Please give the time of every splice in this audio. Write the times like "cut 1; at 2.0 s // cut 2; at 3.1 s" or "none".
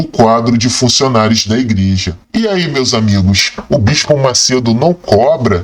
cut 1; at 2.1 s

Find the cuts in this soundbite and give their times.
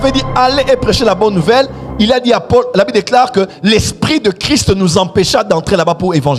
none

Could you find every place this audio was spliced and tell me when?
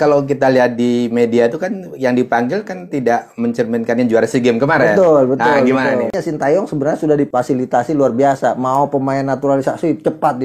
cut 1; at 6.1 s // cut 2; at 7.3 s

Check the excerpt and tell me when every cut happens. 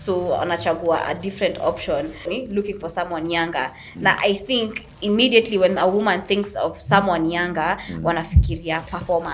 cut 1; at 2.3 s

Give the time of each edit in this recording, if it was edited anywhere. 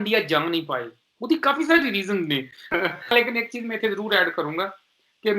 cut 1; at 2.8 s

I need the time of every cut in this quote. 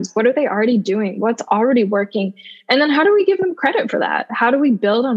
none

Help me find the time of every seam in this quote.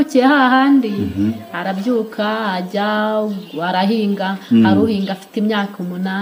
none

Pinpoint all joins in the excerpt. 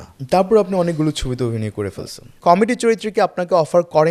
cut 1; at 2.3 s

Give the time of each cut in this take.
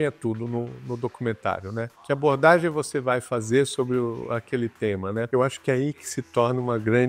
cut 1; at 2.0 s // cut 2; at 5.3 s

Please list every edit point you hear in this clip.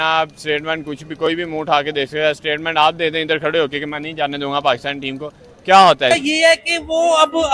cut 1; at 6.1 s

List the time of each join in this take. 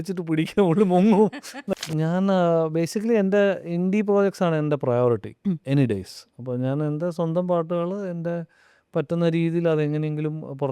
cut 1; at 1.5 s

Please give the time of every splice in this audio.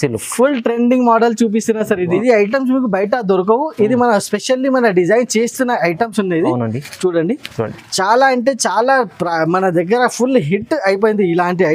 cut 1; at 2.1 s

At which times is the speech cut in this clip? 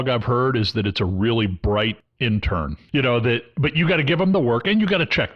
cut 1; at 2.3 s

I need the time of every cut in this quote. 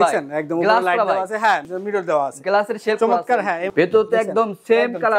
cut 1; at 1.7 s // cut 2; at 3.7 s

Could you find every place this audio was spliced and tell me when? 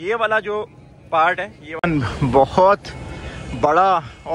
cut 1; at 1.6 s

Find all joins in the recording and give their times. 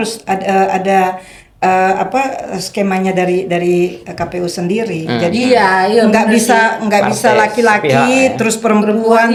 none

